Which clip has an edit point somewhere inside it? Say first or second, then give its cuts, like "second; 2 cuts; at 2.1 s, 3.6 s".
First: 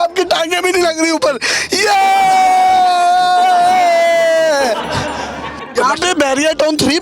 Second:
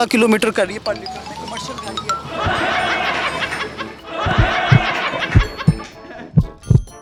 first; 1 cut; at 5.7 s